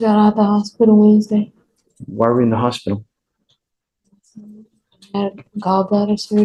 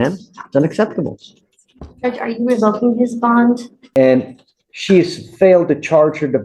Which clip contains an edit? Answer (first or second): second